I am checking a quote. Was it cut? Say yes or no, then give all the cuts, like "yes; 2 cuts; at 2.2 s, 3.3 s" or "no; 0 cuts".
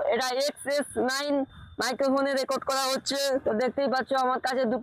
no; 0 cuts